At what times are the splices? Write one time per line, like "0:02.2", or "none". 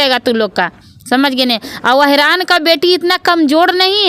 none